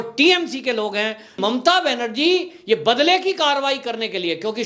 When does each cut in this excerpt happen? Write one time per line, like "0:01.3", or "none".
0:01.4